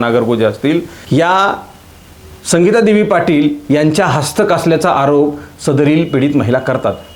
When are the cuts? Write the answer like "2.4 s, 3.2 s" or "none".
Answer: none